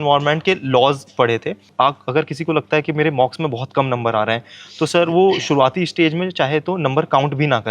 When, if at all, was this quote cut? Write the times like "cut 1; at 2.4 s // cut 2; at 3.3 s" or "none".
cut 1; at 1.7 s